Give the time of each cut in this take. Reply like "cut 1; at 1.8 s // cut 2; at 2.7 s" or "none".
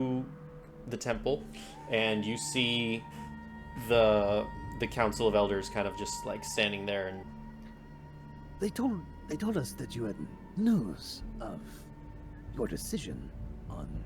cut 1; at 7.2 s